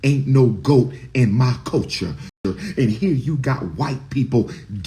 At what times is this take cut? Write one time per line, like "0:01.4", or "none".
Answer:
0:02.3